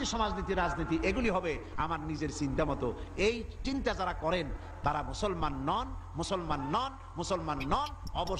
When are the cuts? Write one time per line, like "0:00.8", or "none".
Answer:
none